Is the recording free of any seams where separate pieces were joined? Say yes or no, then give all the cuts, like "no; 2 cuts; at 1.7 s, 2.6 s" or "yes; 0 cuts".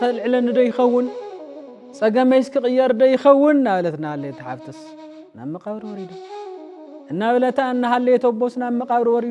yes; 0 cuts